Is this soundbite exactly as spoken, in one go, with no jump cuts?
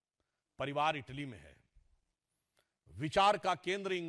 yes; 0 cuts

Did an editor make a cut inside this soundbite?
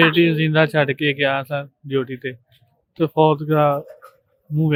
no; 0 cuts

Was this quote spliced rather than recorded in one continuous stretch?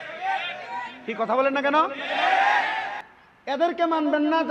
no; 0 cuts

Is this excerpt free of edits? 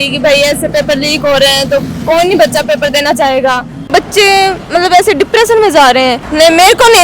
no; 2 cuts; at 3.8 s, 6.2 s

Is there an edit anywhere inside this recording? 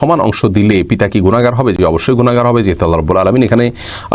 no; 0 cuts

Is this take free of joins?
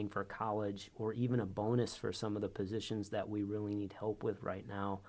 yes; 0 cuts

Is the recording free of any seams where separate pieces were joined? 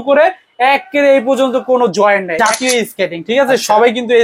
no; 1 cut; at 2.3 s

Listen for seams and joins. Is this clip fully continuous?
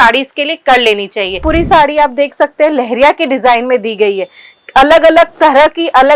no; 1 cut; at 1.4 s

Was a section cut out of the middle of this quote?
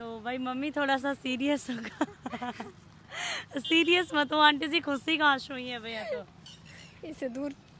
no; 0 cuts

